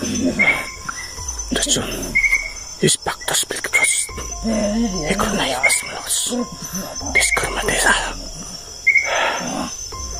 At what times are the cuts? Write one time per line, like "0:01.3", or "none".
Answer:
none